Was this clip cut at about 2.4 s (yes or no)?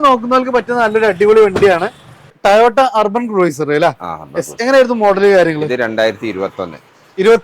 yes